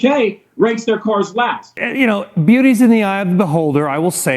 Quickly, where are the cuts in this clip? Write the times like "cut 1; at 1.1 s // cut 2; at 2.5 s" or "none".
cut 1; at 1.8 s